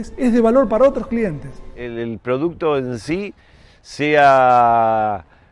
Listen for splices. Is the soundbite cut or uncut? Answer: cut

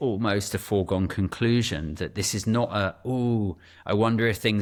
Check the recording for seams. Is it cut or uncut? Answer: uncut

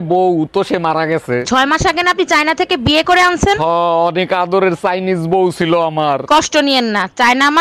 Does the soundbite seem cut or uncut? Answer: uncut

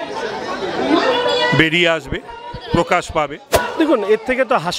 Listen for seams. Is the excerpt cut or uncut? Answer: cut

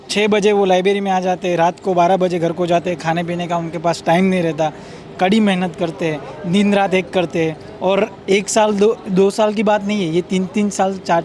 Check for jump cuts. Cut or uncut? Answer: uncut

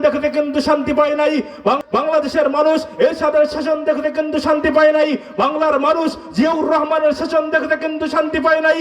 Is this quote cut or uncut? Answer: cut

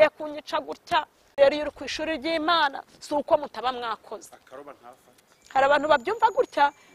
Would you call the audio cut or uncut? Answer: cut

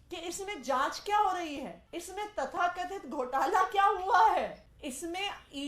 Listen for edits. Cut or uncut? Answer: cut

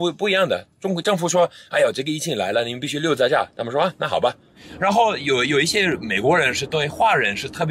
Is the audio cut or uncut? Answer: cut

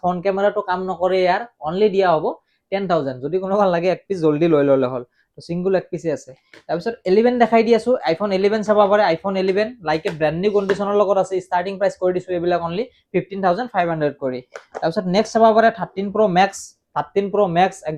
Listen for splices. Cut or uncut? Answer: uncut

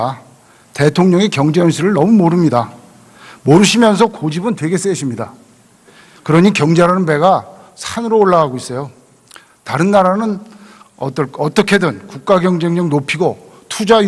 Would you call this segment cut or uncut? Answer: uncut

